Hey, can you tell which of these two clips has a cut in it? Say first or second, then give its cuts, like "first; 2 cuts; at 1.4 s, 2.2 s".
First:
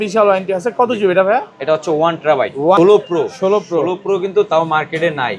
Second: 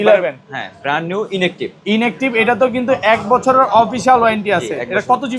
first; 1 cut; at 2.8 s